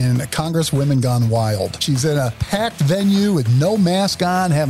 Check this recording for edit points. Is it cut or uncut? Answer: cut